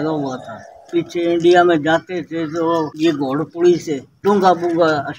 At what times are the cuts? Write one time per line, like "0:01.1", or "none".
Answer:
0:00.9
0:02.9
0:04.1